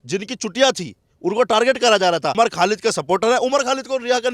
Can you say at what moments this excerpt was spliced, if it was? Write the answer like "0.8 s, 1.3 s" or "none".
2.3 s